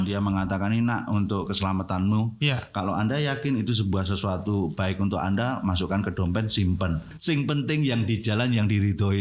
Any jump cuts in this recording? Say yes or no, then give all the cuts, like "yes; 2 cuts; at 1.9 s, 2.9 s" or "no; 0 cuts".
yes; 1 cut; at 7.1 s